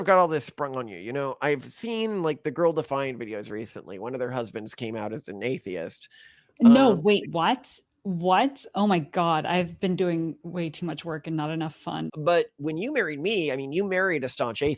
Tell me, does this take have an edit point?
yes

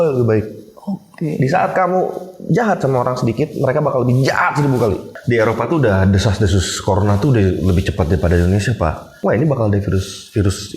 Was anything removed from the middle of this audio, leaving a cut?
yes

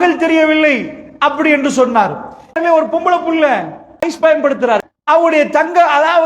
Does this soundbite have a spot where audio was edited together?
yes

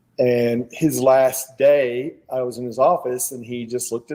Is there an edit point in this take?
no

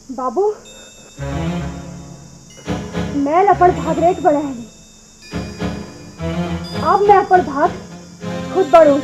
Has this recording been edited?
no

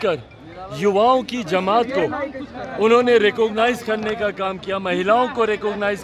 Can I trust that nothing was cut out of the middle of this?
yes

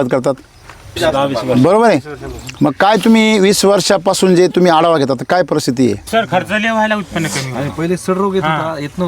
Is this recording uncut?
no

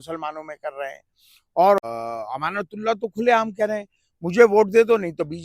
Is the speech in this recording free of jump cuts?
no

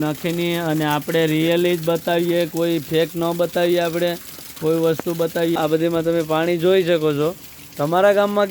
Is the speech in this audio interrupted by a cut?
yes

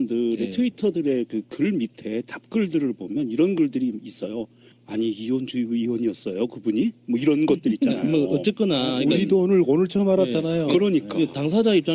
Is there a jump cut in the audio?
no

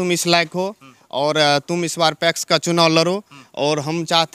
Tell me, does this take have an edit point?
no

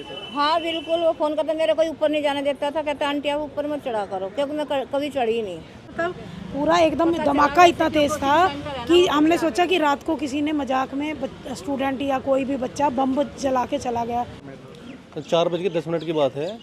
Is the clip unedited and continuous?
no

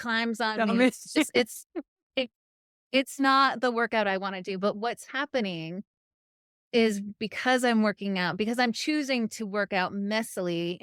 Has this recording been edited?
no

